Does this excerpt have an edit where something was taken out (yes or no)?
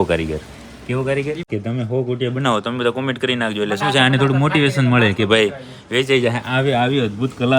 yes